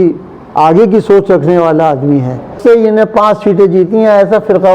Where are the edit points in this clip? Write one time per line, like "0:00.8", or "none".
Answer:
0:02.6